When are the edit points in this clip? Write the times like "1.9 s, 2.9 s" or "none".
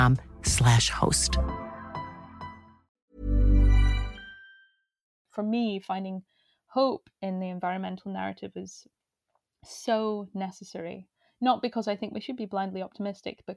5.3 s

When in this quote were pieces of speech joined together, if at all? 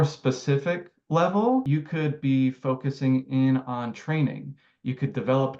1.7 s

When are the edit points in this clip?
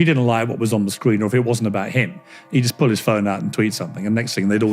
none

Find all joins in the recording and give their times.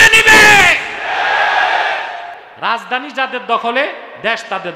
2.4 s

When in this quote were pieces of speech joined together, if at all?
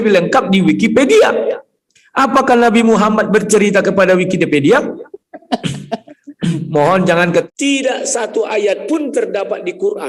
7.5 s

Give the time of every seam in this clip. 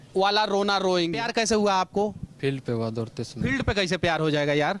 1.2 s

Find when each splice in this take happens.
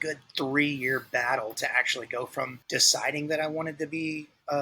2.6 s

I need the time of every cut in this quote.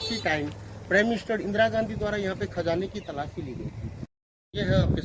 4.1 s

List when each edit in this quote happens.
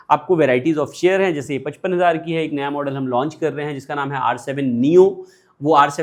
none

